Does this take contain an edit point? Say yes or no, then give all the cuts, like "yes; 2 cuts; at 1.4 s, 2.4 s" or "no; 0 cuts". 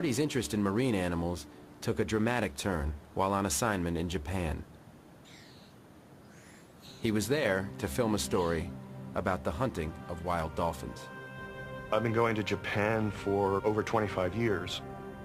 no; 0 cuts